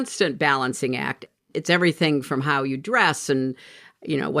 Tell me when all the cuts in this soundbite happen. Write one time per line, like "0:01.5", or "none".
0:01.3